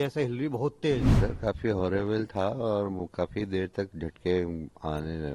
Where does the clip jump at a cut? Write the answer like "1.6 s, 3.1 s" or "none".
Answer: 1.1 s